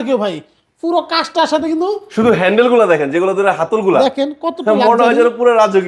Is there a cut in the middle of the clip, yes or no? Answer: no